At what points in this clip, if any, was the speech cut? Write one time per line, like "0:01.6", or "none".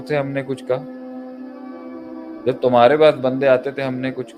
none